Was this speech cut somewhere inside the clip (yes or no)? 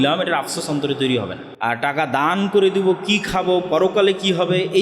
yes